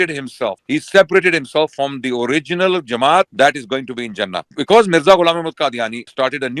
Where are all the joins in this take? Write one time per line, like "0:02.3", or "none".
0:04.5